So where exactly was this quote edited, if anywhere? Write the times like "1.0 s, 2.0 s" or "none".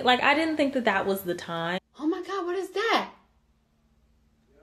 1.8 s